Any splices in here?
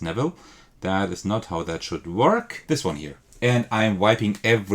yes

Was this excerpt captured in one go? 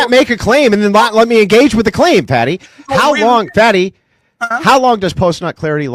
yes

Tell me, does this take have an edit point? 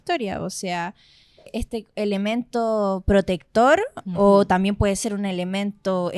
yes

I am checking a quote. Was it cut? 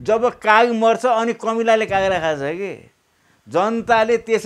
no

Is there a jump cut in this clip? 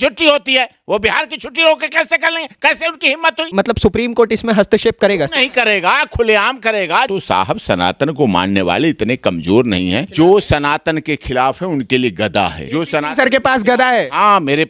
yes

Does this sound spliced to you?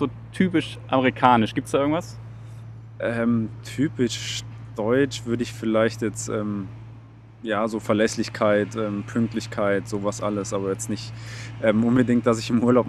no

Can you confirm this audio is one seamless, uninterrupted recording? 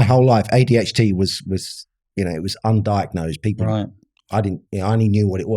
yes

